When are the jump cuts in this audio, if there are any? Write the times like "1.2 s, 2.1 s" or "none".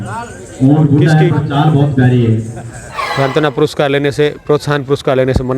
3.0 s